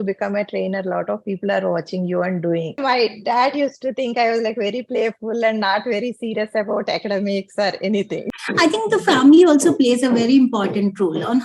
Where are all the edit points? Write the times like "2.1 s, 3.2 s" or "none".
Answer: 2.8 s, 8.4 s